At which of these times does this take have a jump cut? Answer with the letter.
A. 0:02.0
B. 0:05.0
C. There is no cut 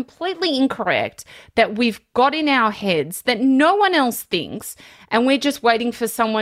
C